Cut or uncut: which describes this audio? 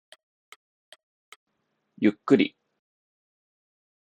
cut